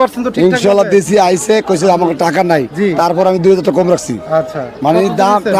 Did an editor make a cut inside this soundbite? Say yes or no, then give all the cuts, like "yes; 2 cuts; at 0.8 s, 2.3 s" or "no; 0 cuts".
no; 0 cuts